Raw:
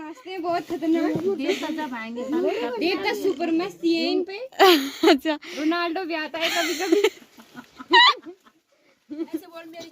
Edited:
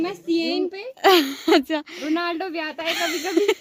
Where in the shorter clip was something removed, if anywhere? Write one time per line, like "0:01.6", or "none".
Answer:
none